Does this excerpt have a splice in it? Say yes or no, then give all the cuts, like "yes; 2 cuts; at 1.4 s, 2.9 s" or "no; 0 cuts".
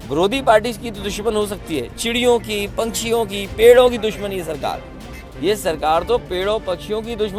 no; 0 cuts